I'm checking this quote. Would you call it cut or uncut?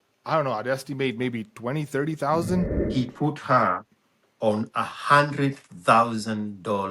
cut